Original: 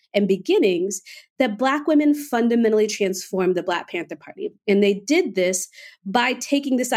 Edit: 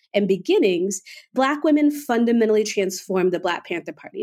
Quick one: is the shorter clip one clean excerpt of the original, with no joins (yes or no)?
no